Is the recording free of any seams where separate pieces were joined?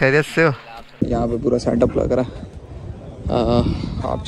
no; 1 cut; at 1.0 s

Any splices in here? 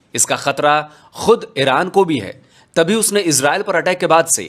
no; 0 cuts

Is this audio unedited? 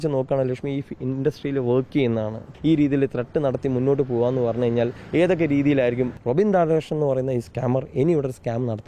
no; 2 cuts; at 2.5 s, 6.1 s

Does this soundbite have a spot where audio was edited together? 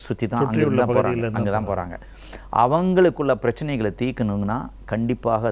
no; 0 cuts

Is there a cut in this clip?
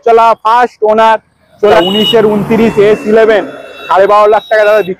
yes; 1 cut; at 1.8 s

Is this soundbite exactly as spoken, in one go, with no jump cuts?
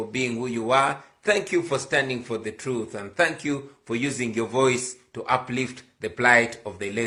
yes; 0 cuts

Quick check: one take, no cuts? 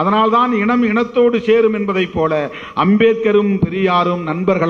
yes; 0 cuts

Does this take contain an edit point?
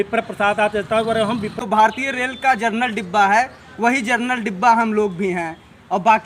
yes; 1 cut; at 1.5 s

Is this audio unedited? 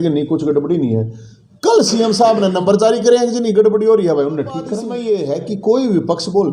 no; 1 cut; at 4.9 s

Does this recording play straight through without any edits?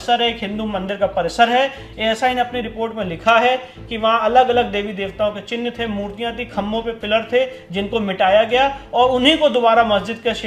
yes; 0 cuts

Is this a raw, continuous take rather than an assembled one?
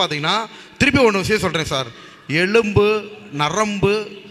yes; 0 cuts

